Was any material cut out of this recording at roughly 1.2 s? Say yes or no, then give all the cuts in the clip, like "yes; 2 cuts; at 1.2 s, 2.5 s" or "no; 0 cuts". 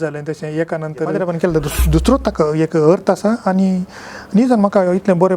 yes; 1 cut; at 1.2 s